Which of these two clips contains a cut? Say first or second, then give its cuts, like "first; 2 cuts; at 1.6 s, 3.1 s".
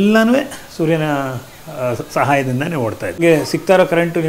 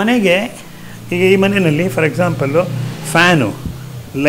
first; 1 cut; at 3.2 s